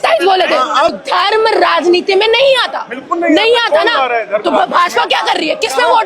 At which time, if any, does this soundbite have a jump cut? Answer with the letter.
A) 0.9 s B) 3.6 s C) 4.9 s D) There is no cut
A